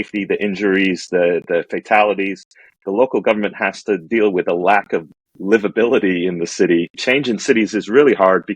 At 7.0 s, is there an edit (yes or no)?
yes